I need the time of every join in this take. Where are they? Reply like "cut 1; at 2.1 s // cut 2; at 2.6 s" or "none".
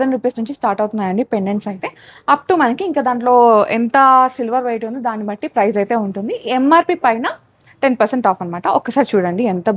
none

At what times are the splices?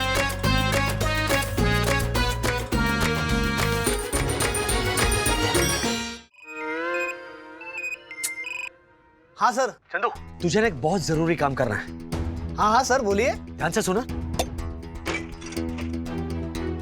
cut 1; at 4.1 s // cut 2; at 6.0 s

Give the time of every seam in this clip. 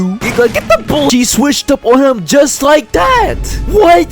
cut 1; at 1.1 s

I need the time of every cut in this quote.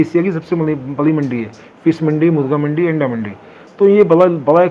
none

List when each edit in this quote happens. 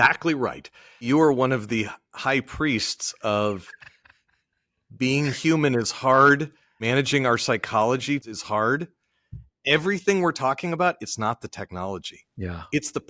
cut 1; at 1.0 s // cut 2; at 6.8 s // cut 3; at 8.2 s

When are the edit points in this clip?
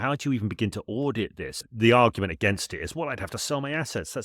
cut 1; at 1.6 s

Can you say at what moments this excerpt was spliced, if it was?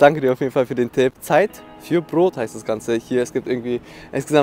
none

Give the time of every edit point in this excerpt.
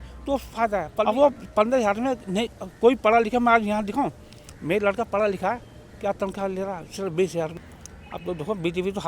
cut 1; at 1.0 s // cut 2; at 7.6 s

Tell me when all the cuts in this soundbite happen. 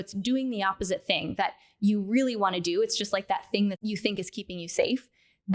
cut 1; at 3.8 s

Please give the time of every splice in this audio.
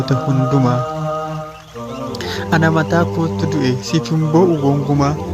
cut 1; at 0.7 s // cut 2; at 2.1 s

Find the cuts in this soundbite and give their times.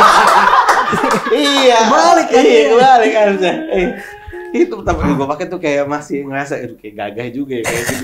none

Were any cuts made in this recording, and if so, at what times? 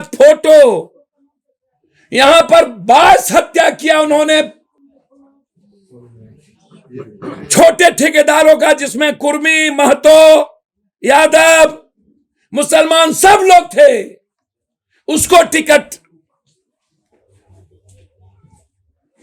none

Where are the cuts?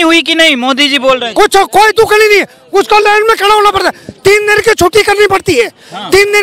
none

